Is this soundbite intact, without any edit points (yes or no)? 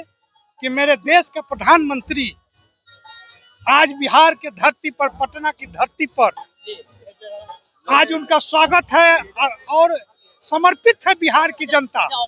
yes